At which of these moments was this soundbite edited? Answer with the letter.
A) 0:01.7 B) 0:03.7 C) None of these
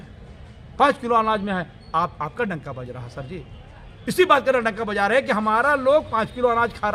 C